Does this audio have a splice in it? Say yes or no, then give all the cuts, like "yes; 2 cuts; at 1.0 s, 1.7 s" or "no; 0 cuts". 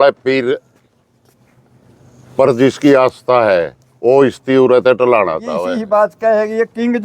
yes; 1 cut; at 5.7 s